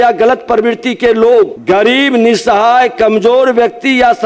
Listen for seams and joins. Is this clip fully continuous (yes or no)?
no